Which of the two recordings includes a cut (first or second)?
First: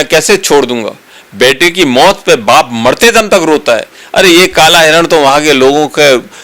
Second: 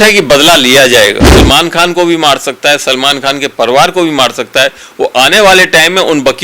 second